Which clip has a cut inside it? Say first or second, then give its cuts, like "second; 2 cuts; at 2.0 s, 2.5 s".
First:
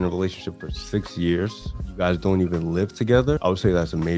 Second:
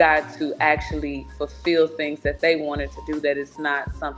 first; 2 cuts; at 1.6 s, 3.4 s